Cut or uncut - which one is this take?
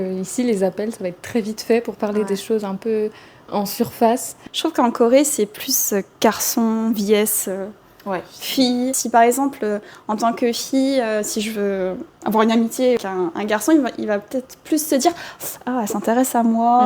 cut